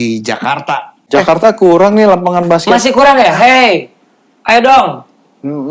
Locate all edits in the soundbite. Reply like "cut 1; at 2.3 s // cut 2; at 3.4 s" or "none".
cut 1; at 1.0 s

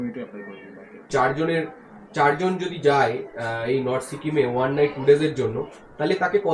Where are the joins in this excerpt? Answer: cut 1; at 1.1 s

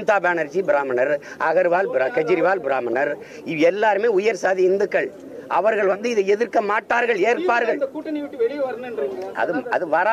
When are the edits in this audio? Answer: none

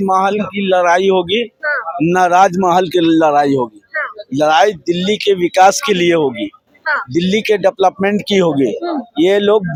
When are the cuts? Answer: none

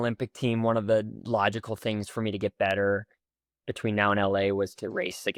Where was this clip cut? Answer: none

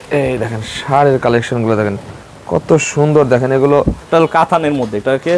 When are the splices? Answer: cut 1; at 4.1 s

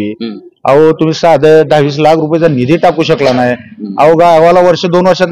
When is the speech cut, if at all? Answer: none

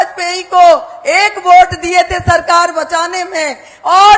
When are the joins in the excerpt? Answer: none

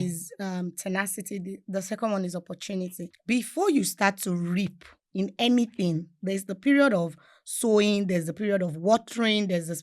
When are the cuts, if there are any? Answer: cut 1; at 3.1 s

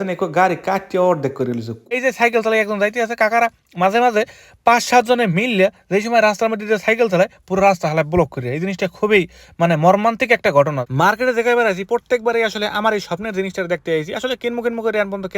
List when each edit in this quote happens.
cut 1; at 2.0 s // cut 2; at 10.8 s

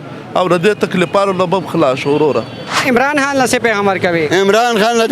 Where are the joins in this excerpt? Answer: cut 1; at 2.6 s

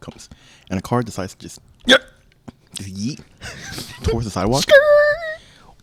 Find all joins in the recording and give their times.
none

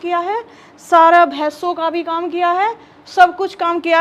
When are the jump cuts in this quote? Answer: none

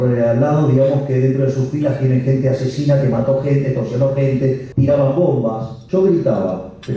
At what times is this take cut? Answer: cut 1; at 4.7 s // cut 2; at 5.8 s

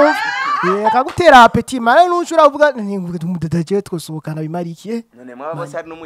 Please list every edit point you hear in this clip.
none

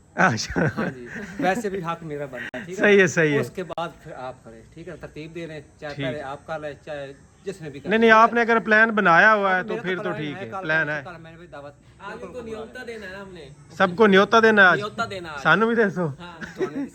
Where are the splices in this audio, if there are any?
none

